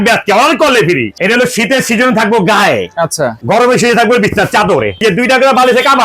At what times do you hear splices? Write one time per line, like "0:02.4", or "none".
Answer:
0:01.1
0:03.4
0:05.0